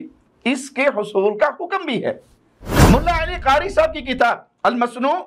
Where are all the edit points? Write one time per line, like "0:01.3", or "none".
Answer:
0:02.7